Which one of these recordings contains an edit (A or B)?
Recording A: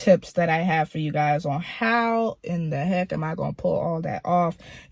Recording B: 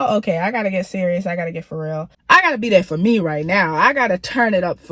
B